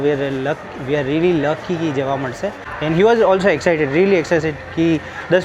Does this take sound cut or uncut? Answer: cut